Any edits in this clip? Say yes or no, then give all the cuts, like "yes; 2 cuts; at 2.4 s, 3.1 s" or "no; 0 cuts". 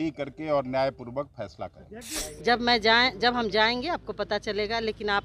yes; 1 cut; at 2.2 s